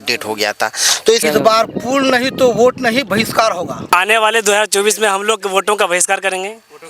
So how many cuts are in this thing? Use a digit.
2